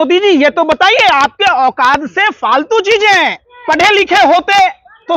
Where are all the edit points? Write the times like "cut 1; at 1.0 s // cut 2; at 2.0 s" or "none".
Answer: cut 1; at 3.5 s

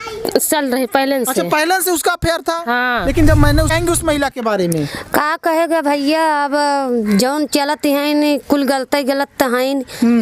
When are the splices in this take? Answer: cut 1; at 3.7 s

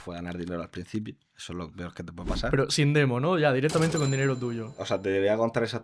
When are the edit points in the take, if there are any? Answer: cut 1; at 4.8 s

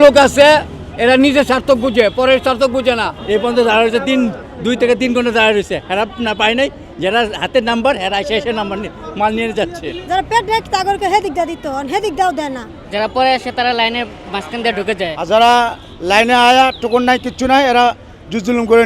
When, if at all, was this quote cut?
cut 1; at 3.1 s // cut 2; at 10.0 s // cut 3; at 12.7 s // cut 4; at 15.2 s

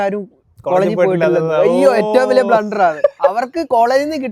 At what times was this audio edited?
none

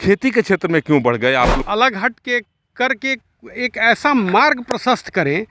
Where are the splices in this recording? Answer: cut 1; at 1.6 s

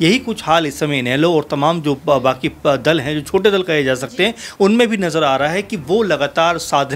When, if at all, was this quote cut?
none

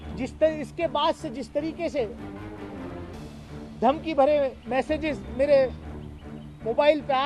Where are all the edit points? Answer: none

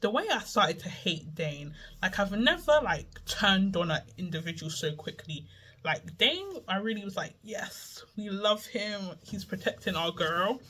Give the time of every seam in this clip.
none

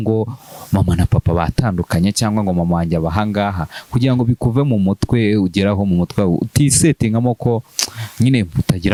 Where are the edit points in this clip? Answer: none

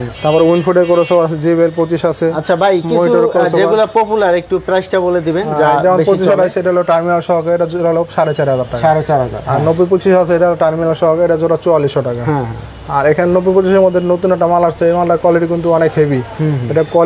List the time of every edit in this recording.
none

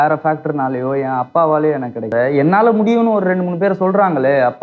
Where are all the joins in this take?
cut 1; at 2.1 s

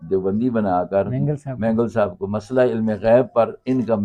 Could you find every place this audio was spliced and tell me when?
none

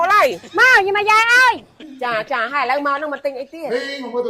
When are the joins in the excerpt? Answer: cut 1; at 1.8 s

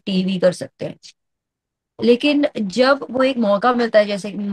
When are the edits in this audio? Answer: none

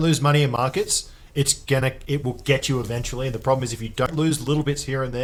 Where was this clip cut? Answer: none

